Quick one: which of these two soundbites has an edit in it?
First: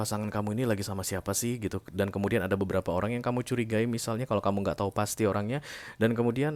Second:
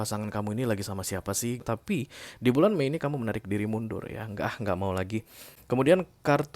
second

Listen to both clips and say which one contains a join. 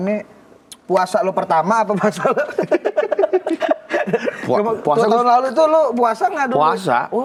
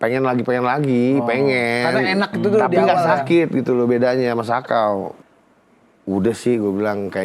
second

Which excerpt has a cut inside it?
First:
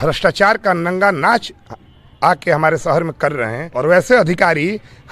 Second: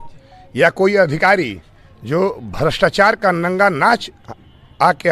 first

